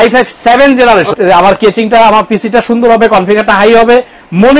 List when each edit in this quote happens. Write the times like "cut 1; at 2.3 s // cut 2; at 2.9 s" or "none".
cut 1; at 1.1 s